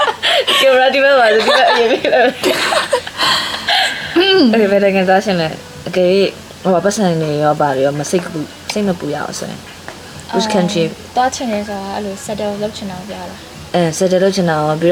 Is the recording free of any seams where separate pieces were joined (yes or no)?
yes